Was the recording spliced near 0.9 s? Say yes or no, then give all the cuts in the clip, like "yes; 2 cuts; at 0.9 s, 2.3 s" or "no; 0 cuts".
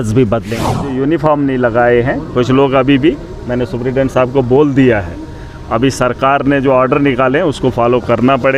yes; 1 cut; at 0.9 s